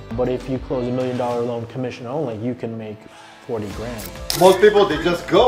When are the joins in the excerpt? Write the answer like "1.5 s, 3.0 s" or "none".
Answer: 4.2 s